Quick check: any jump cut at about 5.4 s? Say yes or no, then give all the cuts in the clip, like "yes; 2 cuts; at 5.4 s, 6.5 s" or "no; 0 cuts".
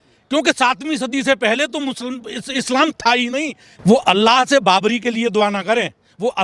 no; 1 cut; at 3.6 s